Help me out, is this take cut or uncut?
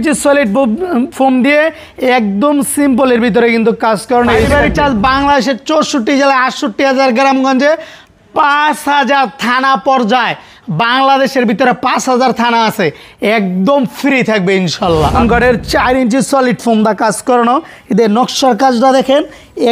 cut